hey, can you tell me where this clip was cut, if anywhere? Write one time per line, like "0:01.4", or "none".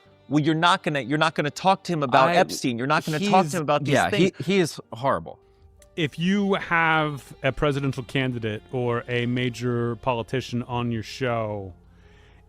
0:05.4